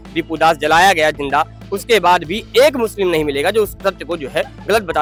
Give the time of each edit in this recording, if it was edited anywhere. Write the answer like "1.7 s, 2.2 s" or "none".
none